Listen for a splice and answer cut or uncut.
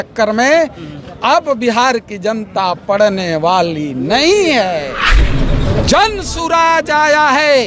cut